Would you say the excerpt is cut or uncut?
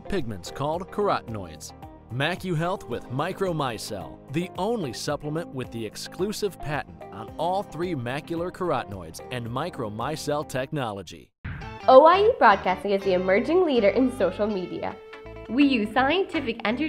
cut